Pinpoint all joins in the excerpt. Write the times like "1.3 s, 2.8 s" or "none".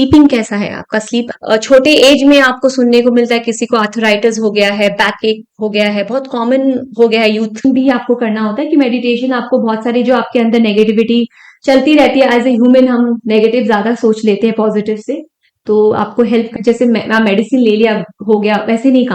1.3 s, 7.6 s, 16.6 s